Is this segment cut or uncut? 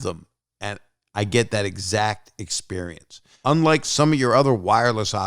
cut